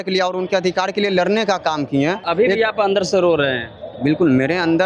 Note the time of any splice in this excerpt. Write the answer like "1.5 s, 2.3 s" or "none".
2.2 s